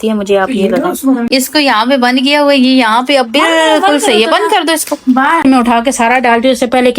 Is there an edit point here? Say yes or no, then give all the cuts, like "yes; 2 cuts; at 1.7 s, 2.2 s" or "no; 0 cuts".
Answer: yes; 2 cuts; at 1.2 s, 5.4 s